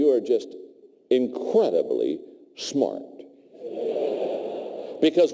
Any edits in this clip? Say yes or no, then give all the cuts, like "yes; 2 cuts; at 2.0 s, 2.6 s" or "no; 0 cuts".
no; 0 cuts